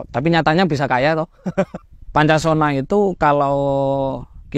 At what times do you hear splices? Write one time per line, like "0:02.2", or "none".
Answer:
0:01.8